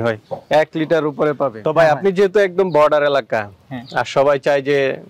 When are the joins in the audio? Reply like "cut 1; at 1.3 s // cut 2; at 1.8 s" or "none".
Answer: cut 1; at 1.6 s